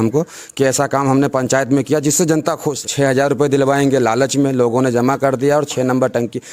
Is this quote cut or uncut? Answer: cut